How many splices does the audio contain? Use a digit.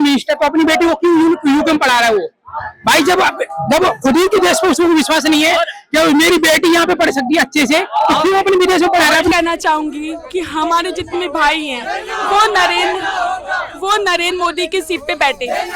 1